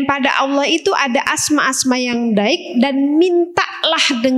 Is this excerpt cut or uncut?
uncut